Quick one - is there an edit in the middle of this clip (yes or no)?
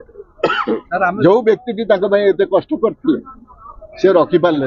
no